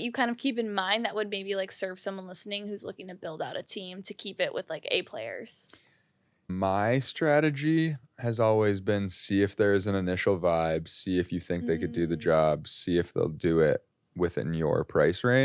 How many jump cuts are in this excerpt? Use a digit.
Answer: 1